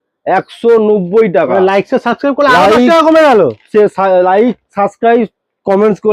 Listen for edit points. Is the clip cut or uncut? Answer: uncut